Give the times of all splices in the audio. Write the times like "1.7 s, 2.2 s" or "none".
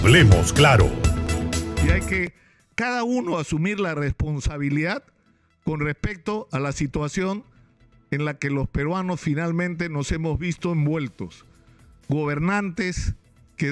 1.8 s